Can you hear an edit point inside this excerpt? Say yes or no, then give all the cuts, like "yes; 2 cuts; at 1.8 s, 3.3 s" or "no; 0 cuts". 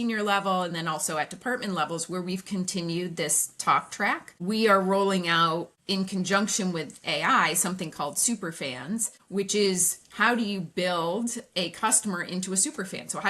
yes; 3 cuts; at 4.3 s, 5.8 s, 9.2 s